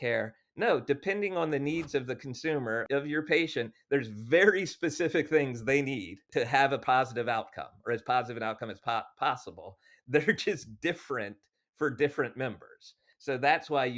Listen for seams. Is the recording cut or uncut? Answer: cut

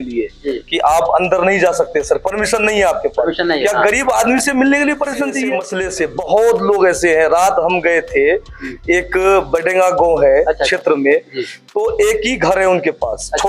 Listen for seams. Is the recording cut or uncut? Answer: cut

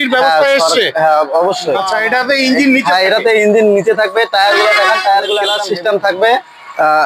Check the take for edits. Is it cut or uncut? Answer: cut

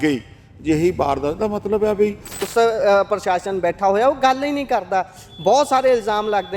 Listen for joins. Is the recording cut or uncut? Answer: cut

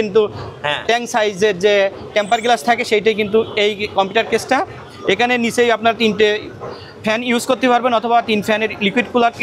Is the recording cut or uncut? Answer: uncut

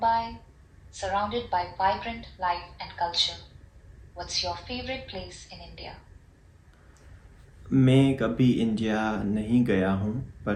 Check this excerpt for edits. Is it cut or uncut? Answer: uncut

